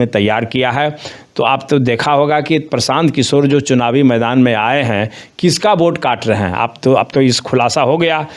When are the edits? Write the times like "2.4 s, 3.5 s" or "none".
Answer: none